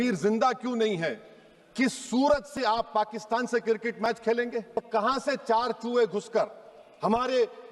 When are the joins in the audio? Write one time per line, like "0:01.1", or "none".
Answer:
0:04.9